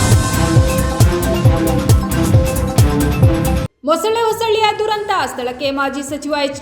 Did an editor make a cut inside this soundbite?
yes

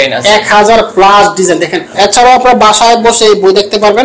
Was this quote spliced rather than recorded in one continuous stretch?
yes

